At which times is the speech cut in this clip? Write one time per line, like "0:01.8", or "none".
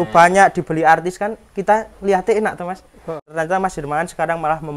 0:03.3